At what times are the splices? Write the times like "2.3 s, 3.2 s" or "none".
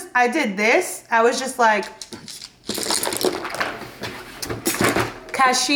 none